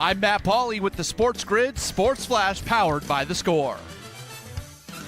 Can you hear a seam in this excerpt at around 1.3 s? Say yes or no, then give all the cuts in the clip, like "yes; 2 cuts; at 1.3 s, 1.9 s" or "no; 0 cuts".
no; 1 cut; at 3.8 s